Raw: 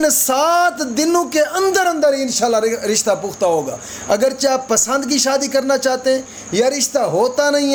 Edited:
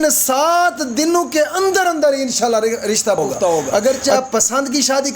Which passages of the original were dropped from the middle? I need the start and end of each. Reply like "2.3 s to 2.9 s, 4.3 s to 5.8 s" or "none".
3.7 s to 4.0 s